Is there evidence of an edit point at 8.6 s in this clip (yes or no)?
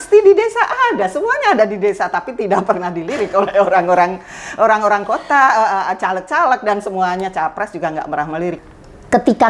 yes